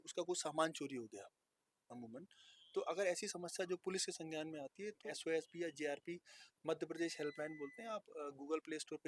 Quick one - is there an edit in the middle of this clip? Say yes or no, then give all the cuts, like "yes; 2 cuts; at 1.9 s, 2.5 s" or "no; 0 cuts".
yes; 1 cut; at 5.1 s